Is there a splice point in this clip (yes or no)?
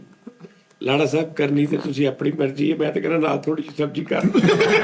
no